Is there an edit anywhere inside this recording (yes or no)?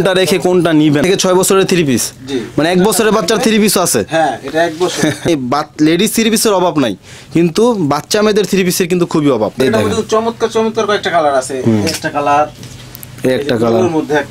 yes